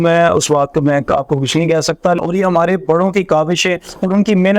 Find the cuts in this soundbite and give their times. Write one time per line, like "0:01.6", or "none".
0:02.2